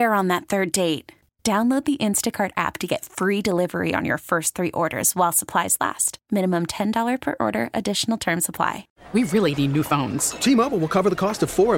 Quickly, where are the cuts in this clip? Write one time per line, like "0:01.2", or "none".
0:08.9